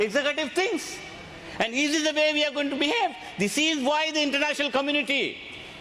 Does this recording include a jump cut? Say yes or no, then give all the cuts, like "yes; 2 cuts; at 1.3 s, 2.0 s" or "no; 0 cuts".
no; 0 cuts